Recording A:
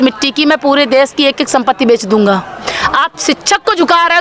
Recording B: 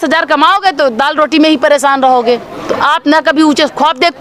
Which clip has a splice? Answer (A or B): A